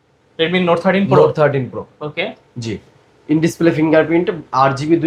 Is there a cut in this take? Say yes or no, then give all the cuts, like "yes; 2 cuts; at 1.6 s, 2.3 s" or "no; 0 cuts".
no; 0 cuts